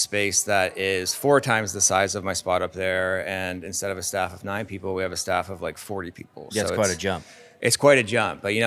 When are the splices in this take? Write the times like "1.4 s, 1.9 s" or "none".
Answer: none